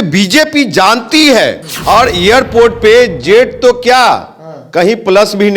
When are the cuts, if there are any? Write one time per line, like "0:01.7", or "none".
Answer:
0:01.7